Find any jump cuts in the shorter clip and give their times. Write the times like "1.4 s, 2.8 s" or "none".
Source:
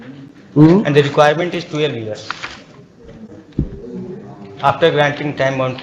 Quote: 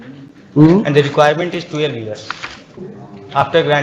2.9 s